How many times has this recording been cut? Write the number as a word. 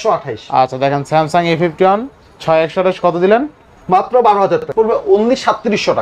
one